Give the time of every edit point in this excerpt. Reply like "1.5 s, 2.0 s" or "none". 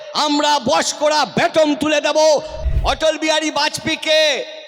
2.6 s